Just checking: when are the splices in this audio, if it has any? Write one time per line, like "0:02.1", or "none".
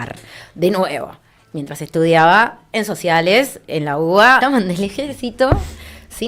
0:04.4